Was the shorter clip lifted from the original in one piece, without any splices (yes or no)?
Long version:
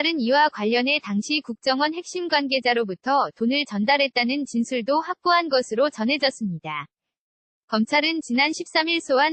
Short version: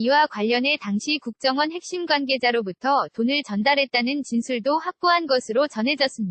yes